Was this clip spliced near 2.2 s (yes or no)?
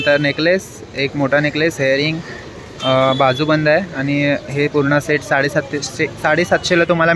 no